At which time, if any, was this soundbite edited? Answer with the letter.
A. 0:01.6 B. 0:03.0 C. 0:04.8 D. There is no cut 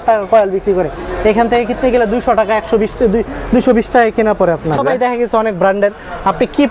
C